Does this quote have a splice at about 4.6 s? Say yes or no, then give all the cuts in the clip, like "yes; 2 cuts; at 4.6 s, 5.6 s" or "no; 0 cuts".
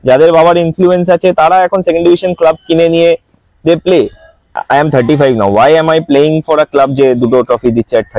yes; 1 cut; at 4.6 s